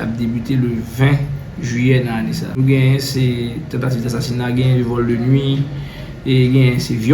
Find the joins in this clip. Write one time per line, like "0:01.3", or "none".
0:02.6